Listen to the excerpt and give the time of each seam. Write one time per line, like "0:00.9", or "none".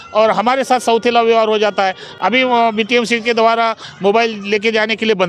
none